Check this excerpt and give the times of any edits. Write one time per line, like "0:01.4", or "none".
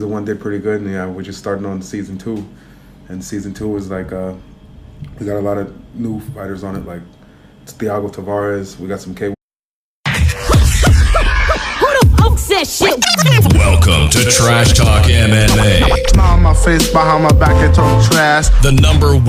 none